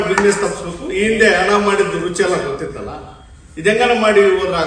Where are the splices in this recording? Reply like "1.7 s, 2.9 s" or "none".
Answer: none